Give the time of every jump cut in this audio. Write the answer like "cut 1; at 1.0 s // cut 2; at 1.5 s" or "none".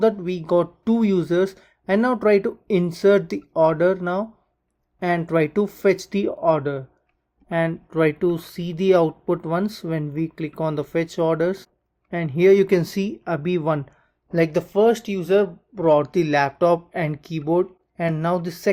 cut 1; at 17.8 s